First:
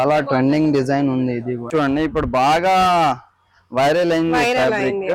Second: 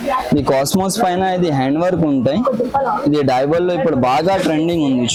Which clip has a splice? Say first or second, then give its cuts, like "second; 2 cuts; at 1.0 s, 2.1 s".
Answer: first; 1 cut; at 1.7 s